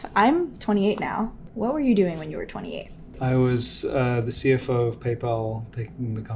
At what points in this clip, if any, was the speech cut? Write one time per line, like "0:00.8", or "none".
0:01.4
0:03.1